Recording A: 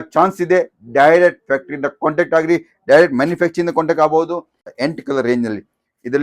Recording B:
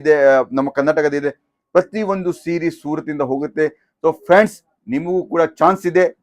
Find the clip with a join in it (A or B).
A